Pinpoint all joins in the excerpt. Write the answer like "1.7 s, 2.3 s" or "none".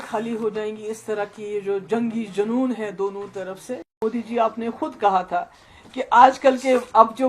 3.9 s